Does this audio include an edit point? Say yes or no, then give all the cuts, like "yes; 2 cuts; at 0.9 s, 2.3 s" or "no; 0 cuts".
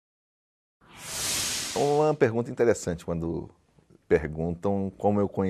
no; 0 cuts